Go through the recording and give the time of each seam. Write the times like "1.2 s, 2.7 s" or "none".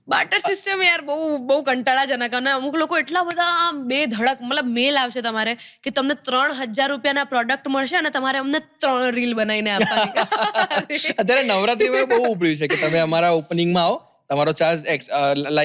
none

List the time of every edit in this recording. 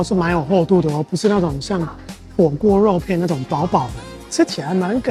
none

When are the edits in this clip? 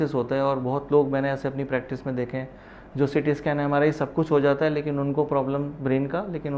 none

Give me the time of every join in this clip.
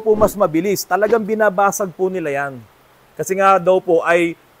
3.0 s

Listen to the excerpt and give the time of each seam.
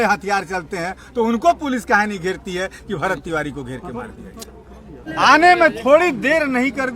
5.0 s

